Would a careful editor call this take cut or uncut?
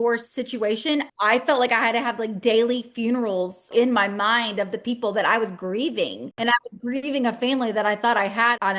cut